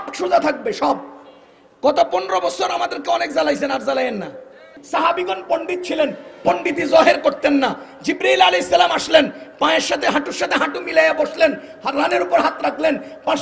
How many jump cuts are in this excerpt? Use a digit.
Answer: 1